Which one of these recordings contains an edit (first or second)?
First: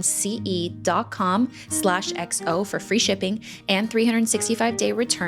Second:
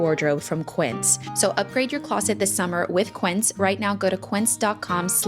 second